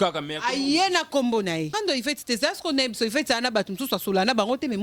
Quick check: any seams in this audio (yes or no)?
yes